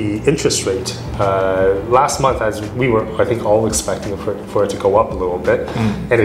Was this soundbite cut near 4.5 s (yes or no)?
no